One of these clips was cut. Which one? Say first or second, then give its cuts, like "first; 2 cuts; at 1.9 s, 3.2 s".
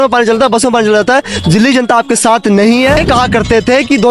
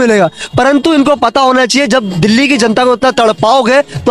first; 1 cut; at 3.0 s